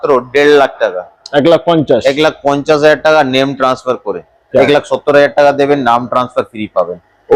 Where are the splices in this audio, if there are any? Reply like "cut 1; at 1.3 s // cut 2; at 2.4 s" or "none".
cut 1; at 4.6 s